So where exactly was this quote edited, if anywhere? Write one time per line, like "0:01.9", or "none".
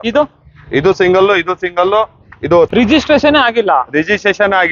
0:02.7